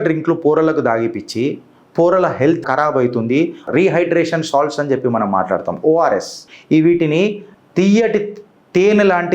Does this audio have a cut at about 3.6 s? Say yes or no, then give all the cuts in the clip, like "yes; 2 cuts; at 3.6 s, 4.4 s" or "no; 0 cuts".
yes; 1 cut; at 3.6 s